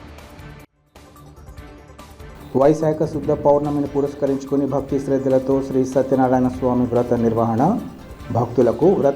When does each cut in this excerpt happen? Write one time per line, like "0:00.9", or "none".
0:01.4